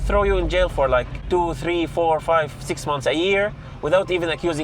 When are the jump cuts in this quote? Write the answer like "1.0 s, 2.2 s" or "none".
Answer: 1.2 s